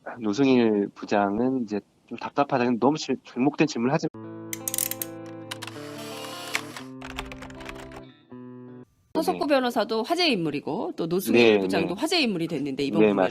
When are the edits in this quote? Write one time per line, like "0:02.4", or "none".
none